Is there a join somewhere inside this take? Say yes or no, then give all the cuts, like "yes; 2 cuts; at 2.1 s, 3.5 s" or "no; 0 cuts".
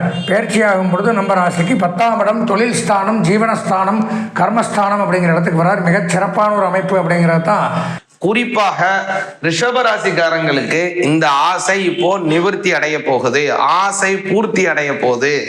yes; 1 cut; at 7.9 s